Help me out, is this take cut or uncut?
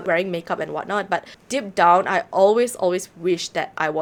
uncut